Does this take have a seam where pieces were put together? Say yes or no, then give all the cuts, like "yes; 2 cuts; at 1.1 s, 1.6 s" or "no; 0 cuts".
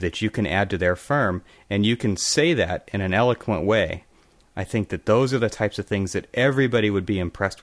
no; 0 cuts